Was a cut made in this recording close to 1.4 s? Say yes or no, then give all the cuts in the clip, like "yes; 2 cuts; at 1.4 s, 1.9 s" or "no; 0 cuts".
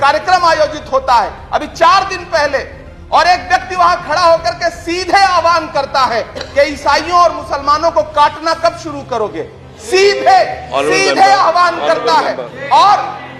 no; 0 cuts